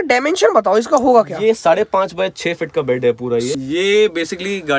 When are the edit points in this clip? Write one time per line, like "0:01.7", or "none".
0:03.5